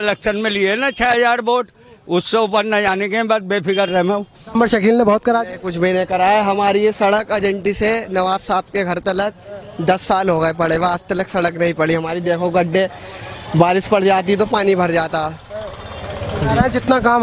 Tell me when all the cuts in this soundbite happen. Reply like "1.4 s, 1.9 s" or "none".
4.5 s